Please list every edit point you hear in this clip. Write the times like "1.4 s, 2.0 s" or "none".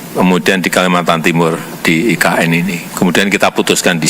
2.8 s